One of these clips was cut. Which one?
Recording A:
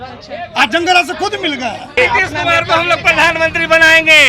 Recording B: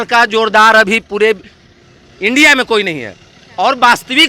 A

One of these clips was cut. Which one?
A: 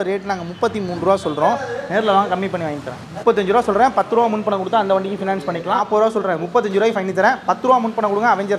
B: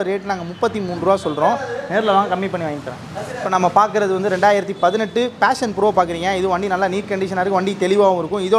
A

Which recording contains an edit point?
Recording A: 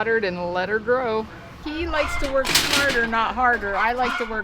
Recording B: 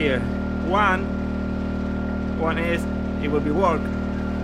A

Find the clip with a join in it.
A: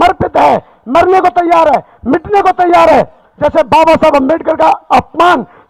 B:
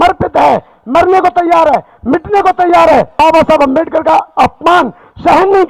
B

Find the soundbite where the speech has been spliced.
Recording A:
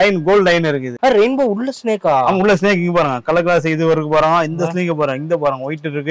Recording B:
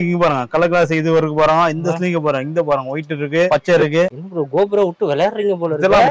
A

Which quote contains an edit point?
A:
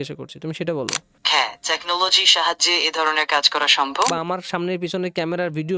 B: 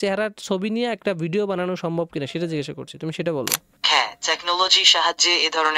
A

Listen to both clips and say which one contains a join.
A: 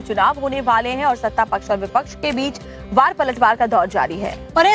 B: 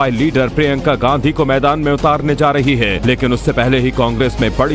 B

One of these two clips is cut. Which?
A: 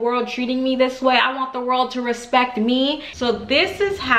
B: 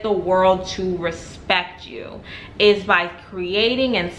A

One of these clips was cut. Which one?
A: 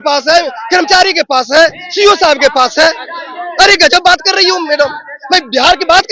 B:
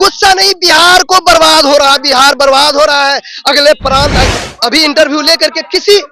B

